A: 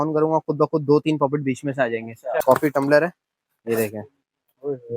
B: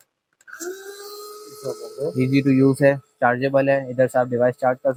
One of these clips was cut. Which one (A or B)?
A